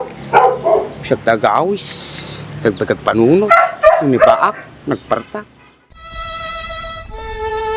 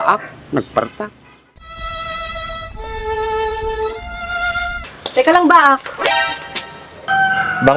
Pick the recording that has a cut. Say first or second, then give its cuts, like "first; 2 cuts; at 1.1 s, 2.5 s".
second; 1 cut; at 4.9 s